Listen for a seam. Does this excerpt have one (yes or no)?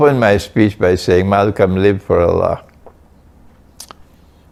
no